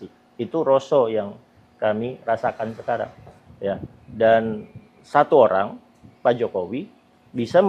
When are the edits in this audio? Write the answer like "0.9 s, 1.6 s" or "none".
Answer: none